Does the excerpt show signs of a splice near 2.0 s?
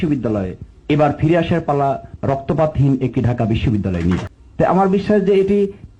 no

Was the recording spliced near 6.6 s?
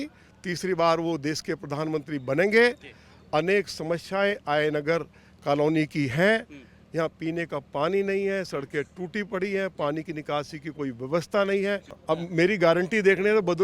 no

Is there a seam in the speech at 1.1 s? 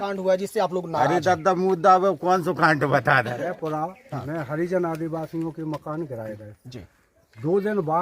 no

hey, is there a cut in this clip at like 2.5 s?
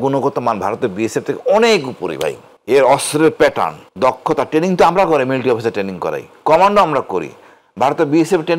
yes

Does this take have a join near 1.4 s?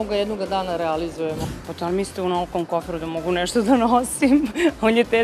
yes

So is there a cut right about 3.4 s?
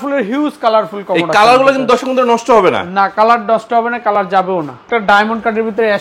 no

